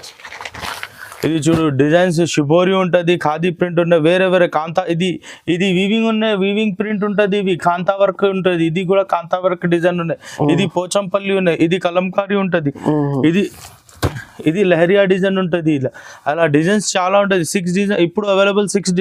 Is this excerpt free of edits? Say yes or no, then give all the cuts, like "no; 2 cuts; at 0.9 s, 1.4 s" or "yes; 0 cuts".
yes; 0 cuts